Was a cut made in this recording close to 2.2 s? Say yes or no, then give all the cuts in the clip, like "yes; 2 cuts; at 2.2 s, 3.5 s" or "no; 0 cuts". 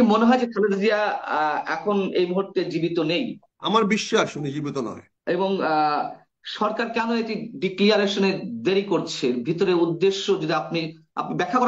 no; 2 cuts; at 3.5 s, 5.1 s